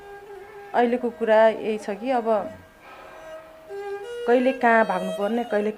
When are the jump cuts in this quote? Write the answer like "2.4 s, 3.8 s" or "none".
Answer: none